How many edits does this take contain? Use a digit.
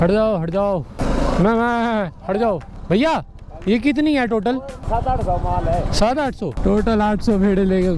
4